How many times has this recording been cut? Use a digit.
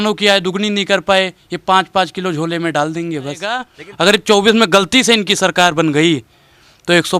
1